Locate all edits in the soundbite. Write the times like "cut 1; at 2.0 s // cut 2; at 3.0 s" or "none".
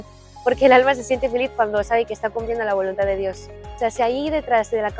cut 1; at 3.7 s